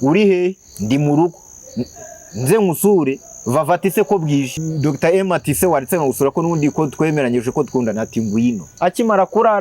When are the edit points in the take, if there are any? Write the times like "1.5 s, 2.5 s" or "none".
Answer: 4.6 s, 8.7 s